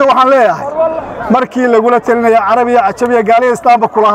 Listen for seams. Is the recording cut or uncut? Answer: uncut